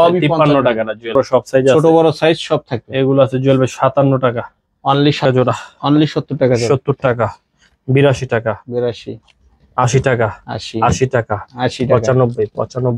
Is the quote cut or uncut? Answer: cut